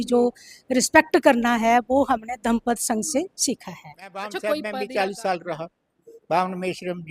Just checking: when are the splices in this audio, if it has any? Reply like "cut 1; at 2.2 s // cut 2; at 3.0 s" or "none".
cut 1; at 4.0 s